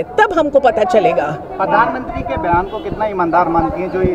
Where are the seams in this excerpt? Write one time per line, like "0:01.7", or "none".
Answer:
none